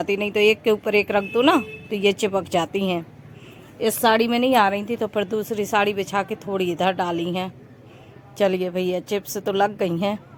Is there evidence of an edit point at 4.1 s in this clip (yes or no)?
no